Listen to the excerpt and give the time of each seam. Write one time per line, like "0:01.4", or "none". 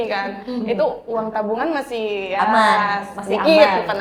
none